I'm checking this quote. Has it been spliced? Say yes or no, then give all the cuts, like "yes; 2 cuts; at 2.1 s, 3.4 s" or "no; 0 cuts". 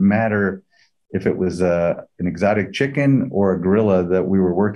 no; 0 cuts